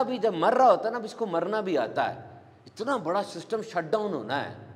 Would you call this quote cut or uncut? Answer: uncut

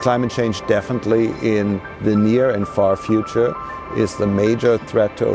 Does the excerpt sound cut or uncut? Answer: uncut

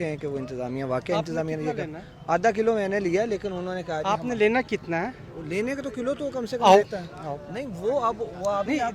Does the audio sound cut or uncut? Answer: uncut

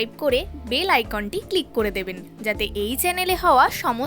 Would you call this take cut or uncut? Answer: cut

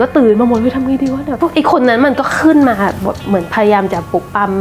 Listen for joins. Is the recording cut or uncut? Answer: cut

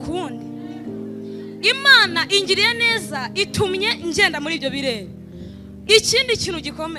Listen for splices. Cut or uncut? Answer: uncut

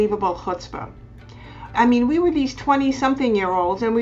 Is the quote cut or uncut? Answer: cut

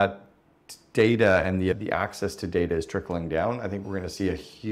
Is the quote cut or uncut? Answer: uncut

